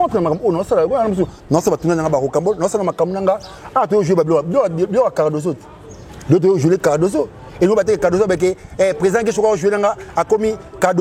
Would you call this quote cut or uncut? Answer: uncut